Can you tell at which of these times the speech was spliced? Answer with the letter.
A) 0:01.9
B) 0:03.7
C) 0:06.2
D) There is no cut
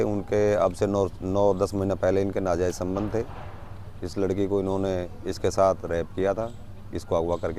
D